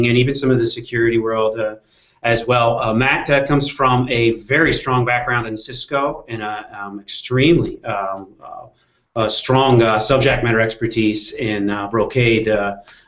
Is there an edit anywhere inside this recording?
yes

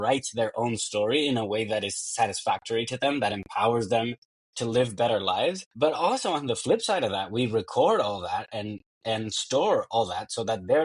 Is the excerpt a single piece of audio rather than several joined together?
no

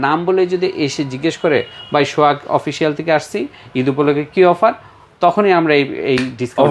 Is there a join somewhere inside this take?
no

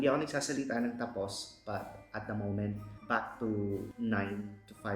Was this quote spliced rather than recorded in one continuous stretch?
yes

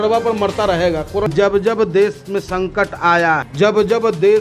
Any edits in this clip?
yes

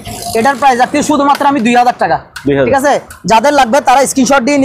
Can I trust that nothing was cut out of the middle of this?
yes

